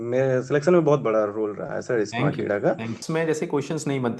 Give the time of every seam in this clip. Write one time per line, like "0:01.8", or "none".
0:03.0